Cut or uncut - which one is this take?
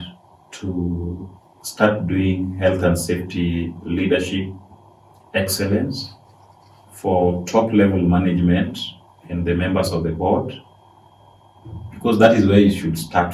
uncut